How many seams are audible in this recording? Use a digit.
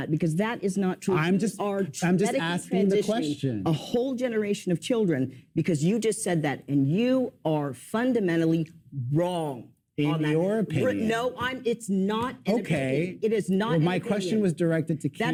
0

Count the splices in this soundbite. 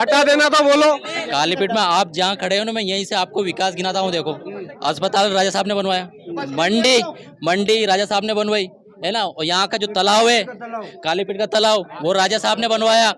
1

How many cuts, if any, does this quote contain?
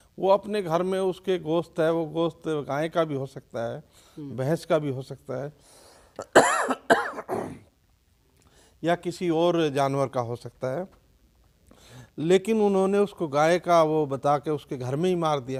0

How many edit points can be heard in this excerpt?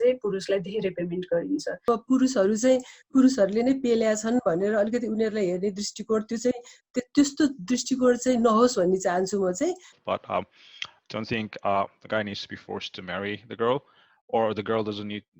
2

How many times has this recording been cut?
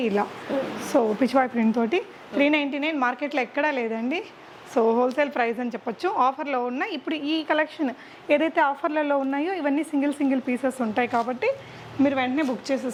0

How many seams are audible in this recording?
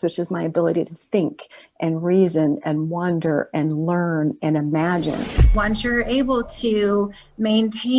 1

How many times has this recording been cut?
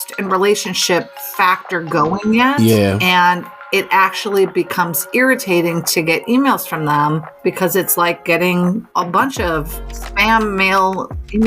2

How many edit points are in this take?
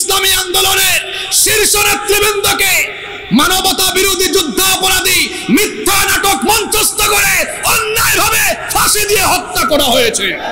0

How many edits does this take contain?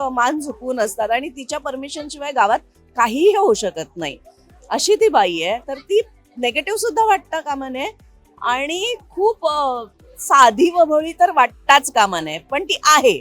0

